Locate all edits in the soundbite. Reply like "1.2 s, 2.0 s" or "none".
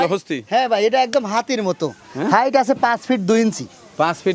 none